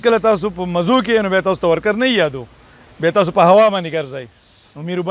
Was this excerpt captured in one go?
yes; 0 cuts

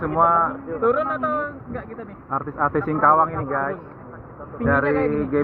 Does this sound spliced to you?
no; 0 cuts

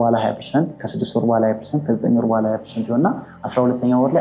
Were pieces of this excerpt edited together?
no; 0 cuts

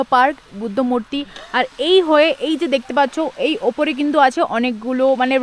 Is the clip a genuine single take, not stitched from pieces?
yes; 0 cuts

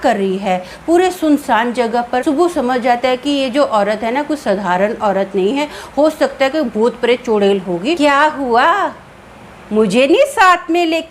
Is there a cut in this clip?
yes; 2 cuts; at 2.2 s, 8.0 s

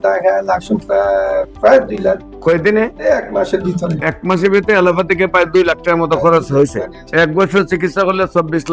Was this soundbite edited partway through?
no; 0 cuts

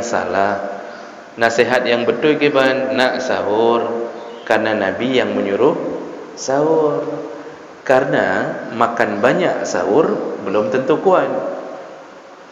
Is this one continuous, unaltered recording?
yes; 0 cuts

